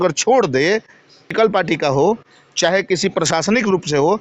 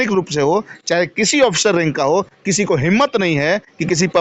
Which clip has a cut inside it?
first; 1 cut; at 1.3 s

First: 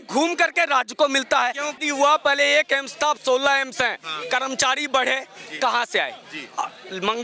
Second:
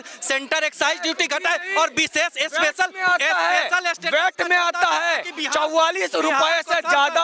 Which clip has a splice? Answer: first; 1 cut; at 1.8 s

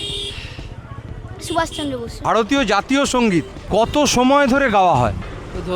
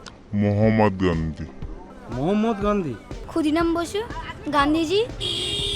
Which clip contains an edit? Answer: first; 1 cut; at 2.1 s

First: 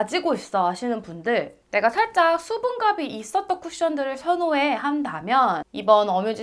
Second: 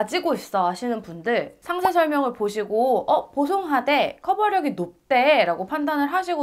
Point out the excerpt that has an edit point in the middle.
second; 1 cut; at 1.7 s

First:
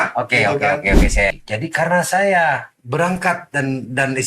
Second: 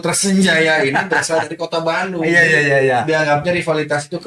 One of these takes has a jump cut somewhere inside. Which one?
first; 2 cuts; at 1.3 s, 2.8 s

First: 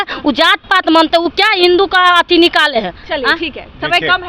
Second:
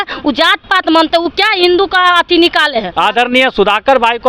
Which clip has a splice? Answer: second; 1 cut; at 2.9 s

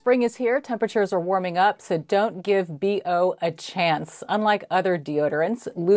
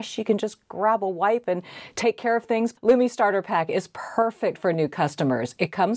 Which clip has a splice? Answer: second; 1 cut; at 2.7 s

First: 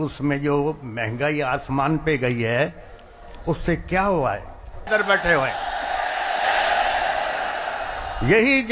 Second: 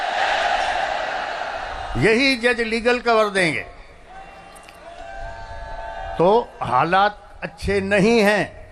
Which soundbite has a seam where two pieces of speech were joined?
first; 1 cut; at 4.9 s

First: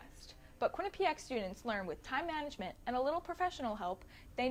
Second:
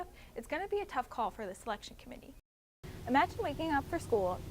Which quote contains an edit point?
second; 1 cut; at 2.6 s

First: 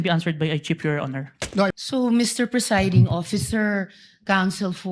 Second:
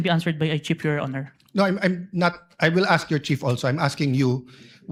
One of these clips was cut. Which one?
first; 1 cut; at 1.7 s

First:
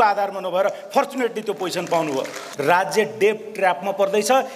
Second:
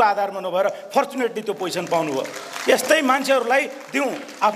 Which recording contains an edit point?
first; 1 cut; at 2.5 s

